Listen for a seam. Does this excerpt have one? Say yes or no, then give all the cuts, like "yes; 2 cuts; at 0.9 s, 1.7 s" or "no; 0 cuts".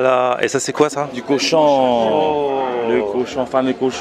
no; 0 cuts